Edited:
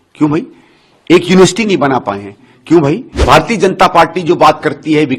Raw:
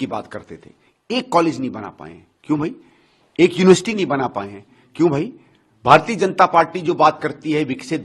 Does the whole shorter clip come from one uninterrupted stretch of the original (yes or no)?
no